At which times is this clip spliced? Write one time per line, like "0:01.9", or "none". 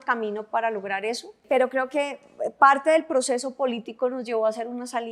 0:01.4